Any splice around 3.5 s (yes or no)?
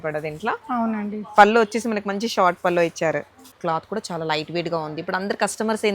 yes